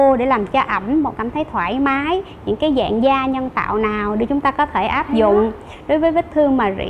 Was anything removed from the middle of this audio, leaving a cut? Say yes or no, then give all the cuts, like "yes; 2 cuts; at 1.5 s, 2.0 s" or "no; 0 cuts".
no; 0 cuts